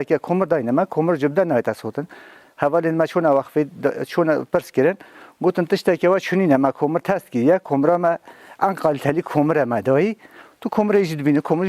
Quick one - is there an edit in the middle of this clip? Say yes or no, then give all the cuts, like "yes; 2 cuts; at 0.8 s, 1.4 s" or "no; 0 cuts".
no; 0 cuts